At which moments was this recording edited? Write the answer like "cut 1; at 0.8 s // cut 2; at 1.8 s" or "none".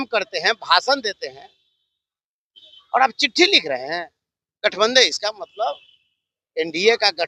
none